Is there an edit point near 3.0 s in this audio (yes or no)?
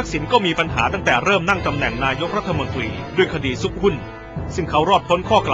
yes